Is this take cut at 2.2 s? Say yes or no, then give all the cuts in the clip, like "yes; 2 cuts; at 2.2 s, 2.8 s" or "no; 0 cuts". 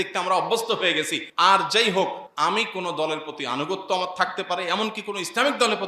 yes; 2 cuts; at 1.2 s, 2.2 s